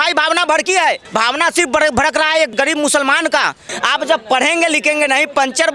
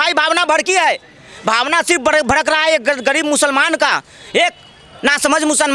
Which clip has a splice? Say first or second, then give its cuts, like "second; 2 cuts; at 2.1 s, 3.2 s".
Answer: first; 3 cuts; at 1.0 s, 2.5 s, 3.7 s